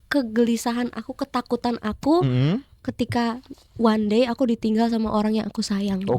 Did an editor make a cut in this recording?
no; 0 cuts

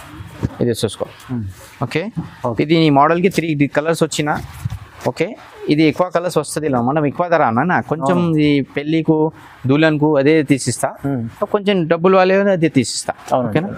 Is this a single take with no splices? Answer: yes; 0 cuts

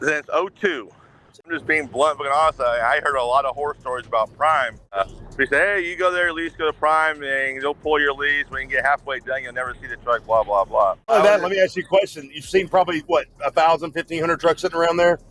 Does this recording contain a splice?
yes; 3 cuts; at 1.5 s, 4.9 s, 11.1 s

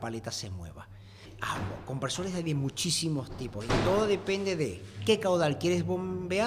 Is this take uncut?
no; 1 cut; at 1.2 s

